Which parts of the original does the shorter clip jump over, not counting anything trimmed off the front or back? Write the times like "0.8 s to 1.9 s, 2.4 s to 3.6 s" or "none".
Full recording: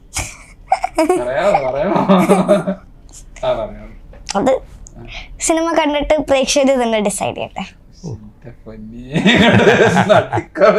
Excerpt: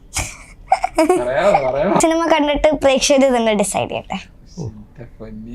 2.0 s to 5.5 s